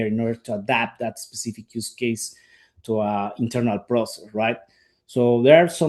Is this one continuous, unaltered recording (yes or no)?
yes